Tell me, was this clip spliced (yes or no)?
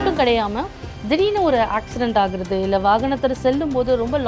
no